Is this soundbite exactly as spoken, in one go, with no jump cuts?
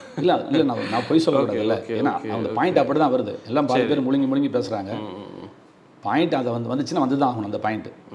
yes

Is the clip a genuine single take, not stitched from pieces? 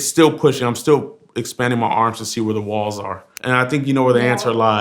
no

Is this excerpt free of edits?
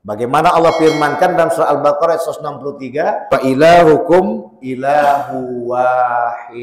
no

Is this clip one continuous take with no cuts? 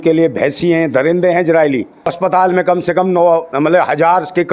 no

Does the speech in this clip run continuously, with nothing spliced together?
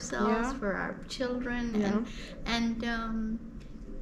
yes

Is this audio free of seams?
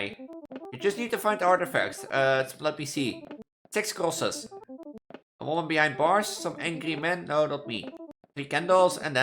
yes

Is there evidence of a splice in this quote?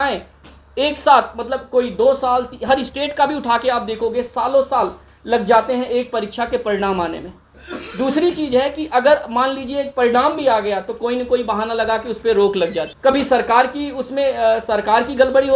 yes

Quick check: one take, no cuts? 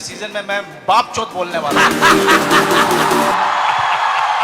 yes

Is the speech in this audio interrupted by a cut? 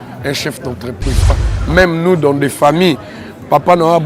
yes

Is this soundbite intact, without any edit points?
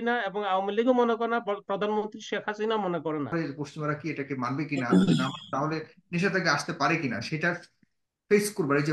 no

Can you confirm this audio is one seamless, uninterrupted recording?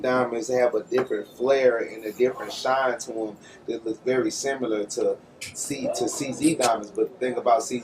no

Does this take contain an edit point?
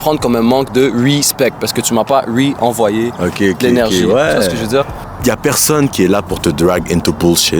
yes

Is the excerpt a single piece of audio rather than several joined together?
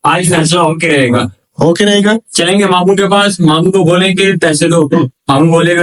yes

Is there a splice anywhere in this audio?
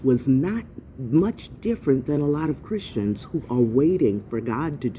no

